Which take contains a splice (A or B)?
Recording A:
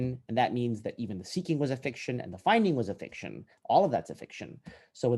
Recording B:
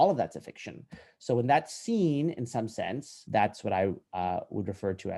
B